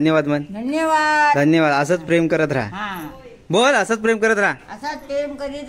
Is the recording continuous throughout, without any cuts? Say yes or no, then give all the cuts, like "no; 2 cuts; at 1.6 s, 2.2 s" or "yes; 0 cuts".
yes; 0 cuts